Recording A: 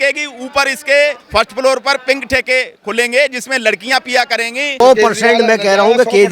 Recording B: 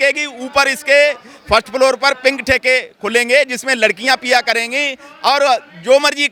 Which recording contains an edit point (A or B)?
A